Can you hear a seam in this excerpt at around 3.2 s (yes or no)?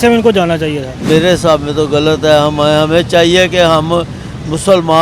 no